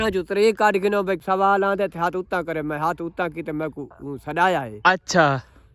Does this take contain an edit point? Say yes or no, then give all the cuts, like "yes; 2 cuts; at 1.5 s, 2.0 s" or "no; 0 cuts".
yes; 1 cut; at 1.2 s